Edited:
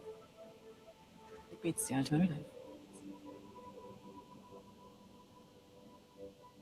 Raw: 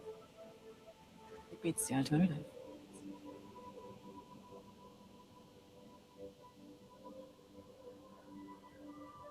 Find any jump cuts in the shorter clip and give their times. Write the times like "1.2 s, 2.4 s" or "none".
none